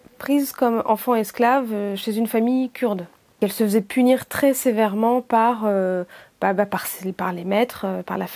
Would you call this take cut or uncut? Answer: cut